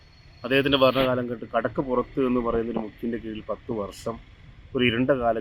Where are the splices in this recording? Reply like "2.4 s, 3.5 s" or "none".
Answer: none

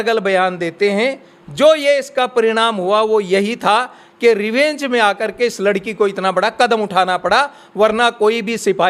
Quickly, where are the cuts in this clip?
none

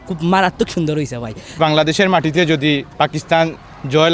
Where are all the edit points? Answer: 1.6 s, 2.9 s

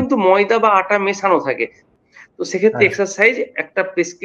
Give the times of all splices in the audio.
1.9 s

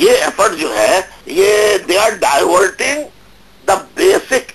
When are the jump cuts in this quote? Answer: 1.2 s

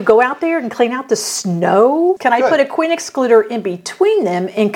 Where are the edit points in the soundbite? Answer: 2.2 s

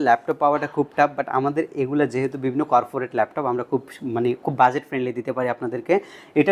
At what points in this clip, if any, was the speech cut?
none

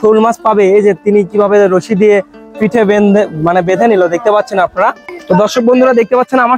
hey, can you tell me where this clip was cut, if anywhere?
5.1 s

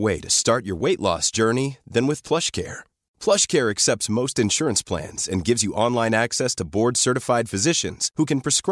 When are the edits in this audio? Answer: none

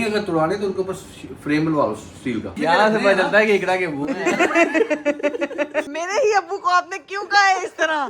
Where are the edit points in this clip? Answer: 2.5 s, 5.9 s

